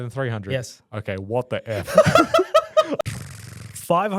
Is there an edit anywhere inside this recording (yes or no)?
yes